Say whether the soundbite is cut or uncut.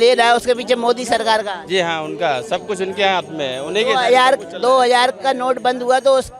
uncut